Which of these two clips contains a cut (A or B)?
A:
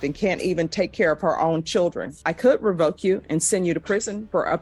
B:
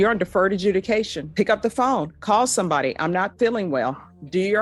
A